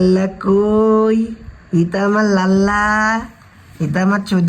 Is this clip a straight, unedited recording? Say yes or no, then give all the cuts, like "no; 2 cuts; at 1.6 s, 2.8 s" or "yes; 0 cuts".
yes; 0 cuts